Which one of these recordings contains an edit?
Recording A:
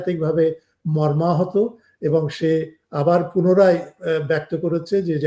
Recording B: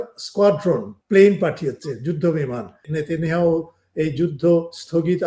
B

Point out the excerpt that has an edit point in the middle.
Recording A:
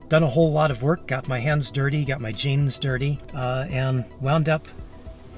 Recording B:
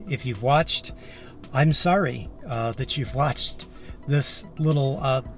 A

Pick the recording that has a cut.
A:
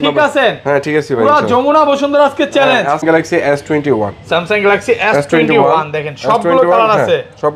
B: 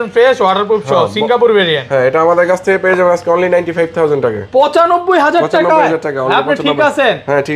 A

